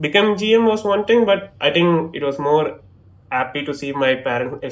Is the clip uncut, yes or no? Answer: yes